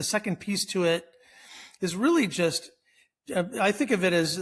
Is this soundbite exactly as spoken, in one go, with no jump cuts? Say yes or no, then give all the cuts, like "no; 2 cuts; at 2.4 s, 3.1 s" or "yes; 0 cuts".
yes; 0 cuts